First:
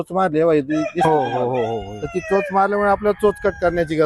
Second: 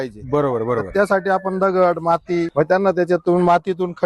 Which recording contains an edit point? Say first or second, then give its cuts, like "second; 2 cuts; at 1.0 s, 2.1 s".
second; 1 cut; at 2.5 s